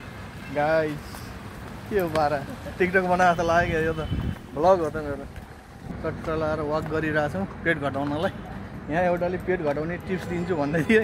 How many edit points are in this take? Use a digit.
1